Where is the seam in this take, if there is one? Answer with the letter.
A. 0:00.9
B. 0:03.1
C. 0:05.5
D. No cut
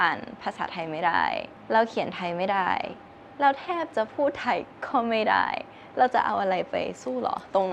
D